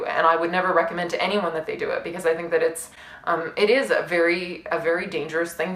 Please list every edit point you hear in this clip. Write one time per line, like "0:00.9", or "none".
none